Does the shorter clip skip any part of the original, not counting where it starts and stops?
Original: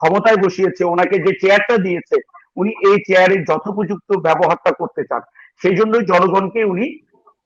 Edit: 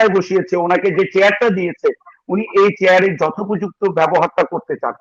no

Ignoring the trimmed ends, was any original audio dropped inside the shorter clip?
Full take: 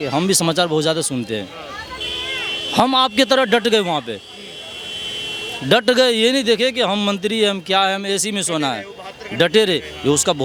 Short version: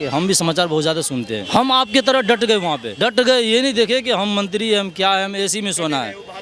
yes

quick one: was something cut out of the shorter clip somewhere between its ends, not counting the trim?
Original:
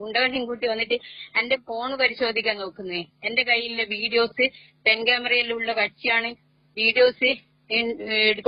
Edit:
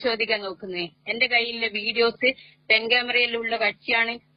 no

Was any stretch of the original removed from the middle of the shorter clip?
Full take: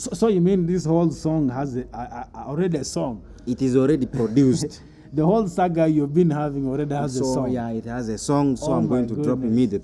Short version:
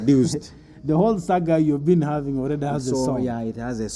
no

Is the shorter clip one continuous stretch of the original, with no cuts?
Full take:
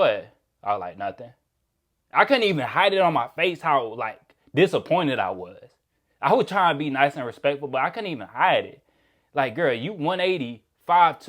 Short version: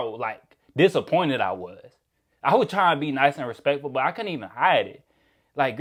yes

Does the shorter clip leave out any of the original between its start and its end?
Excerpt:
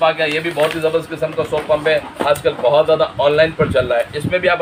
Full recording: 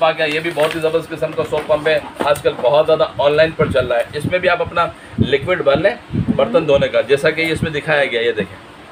no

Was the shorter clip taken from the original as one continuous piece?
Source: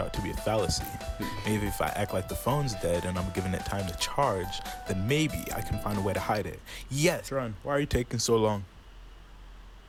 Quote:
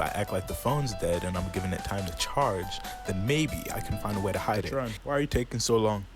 no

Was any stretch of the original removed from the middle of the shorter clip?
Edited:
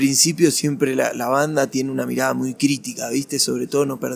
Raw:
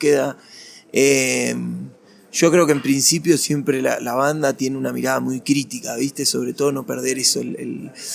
no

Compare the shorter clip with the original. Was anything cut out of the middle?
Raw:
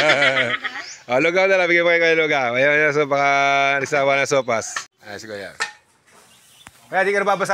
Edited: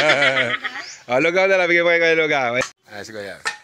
yes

